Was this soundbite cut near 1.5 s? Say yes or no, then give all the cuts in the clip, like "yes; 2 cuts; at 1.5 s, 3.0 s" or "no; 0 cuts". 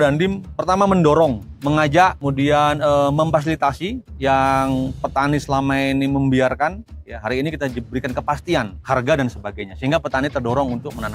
yes; 4 cuts; at 1.5 s, 2.2 s, 4.1 s, 8.8 s